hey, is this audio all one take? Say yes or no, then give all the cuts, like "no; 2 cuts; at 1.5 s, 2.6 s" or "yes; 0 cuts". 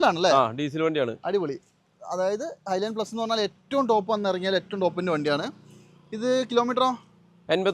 yes; 0 cuts